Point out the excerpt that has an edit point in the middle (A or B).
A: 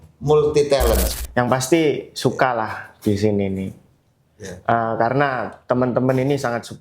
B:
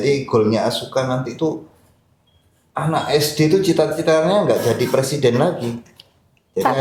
A